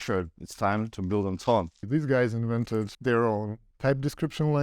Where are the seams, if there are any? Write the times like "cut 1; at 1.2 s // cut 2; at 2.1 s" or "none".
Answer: cut 1; at 1.8 s // cut 2; at 2.9 s // cut 3; at 3.6 s